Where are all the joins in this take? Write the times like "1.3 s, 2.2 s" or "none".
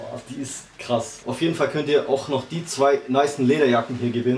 1.2 s